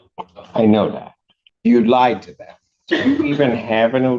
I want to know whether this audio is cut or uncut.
uncut